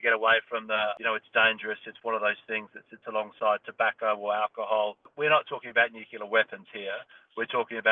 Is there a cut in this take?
yes; 2 cuts; at 1.0 s, 5.0 s

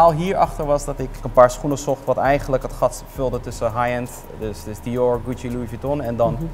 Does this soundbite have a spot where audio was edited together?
no; 0 cuts

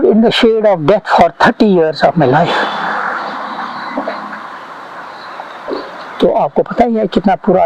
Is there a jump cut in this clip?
no; 0 cuts

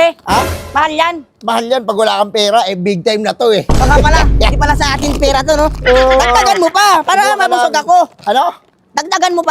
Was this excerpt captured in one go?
yes; 0 cuts

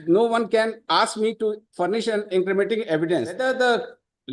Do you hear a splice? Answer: yes; 1 cut; at 3.4 s

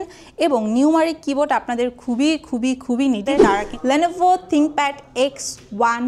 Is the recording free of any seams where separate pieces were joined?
no; 1 cut; at 3.7 s

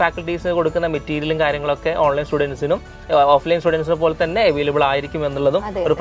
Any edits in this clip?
no; 0 cuts

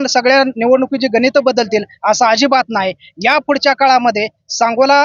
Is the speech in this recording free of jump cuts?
yes; 0 cuts

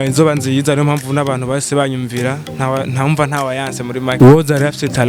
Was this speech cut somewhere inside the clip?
yes; 1 cut; at 4.1 s

